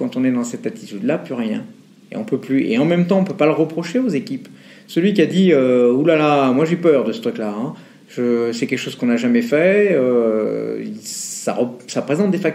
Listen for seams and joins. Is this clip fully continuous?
yes; 0 cuts

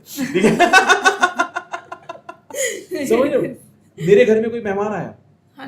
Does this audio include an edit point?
no; 0 cuts

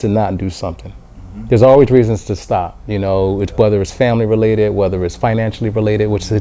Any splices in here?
no; 0 cuts

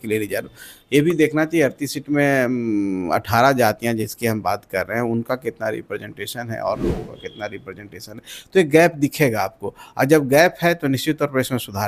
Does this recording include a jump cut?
no; 0 cuts

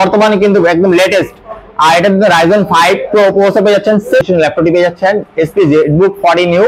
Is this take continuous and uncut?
no; 1 cut; at 4.2 s

